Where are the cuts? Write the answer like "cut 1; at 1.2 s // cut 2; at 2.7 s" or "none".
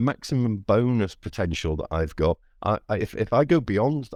none

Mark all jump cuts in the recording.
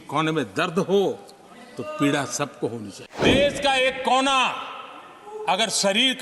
cut 1; at 3.3 s

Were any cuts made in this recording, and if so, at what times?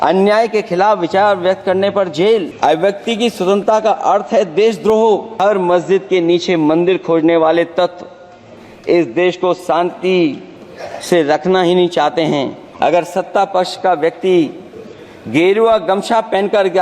cut 1; at 2.5 s // cut 2; at 5.3 s // cut 3; at 12.6 s

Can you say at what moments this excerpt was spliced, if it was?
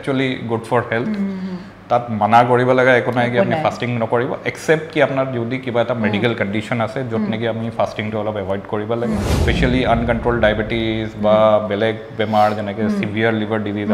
cut 1; at 9.3 s

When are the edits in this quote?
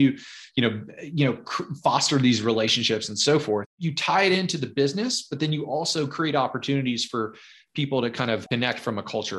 cut 1; at 3.7 s // cut 2; at 8.4 s

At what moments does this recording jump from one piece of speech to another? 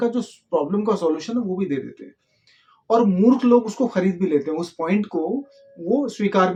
none

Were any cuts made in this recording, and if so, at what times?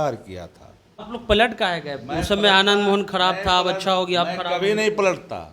cut 1; at 1.1 s

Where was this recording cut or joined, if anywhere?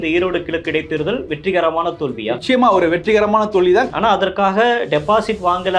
cut 1; at 3.9 s

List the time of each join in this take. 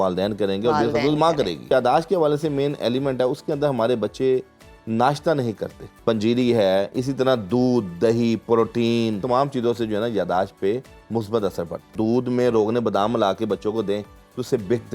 cut 1; at 1.7 s // cut 2; at 5.8 s // cut 3; at 9.2 s // cut 4; at 11.9 s

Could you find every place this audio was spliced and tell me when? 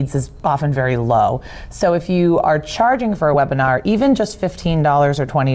none

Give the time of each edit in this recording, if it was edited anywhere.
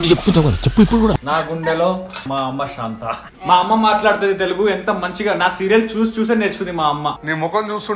cut 1; at 1.2 s // cut 2; at 2.2 s // cut 3; at 3.3 s

